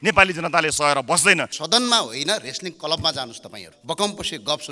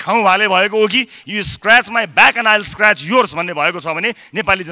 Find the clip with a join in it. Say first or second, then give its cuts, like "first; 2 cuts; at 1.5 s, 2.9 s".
first; 2 cuts; at 1.5 s, 3.7 s